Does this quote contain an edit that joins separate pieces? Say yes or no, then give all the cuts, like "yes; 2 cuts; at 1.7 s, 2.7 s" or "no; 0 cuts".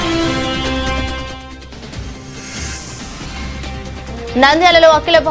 no; 0 cuts